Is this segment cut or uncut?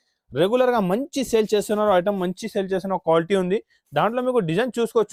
uncut